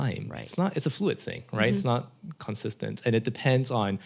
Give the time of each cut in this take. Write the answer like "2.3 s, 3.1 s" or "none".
none